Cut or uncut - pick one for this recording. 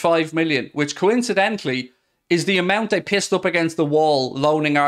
uncut